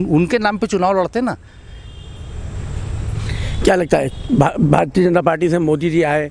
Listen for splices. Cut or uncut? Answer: uncut